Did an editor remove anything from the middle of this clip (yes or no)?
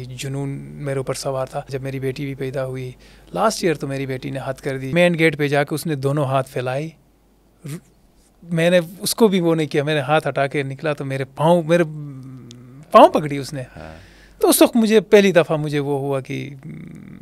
yes